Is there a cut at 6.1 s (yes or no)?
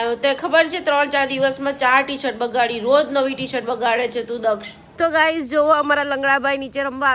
no